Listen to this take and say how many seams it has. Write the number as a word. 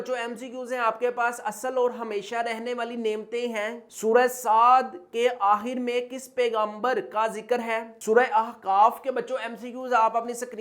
zero